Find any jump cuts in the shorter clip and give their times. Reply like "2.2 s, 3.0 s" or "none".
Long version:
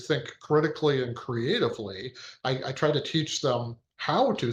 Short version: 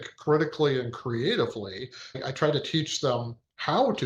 2.2 s